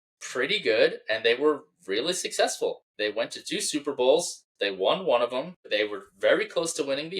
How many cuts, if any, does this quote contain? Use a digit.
2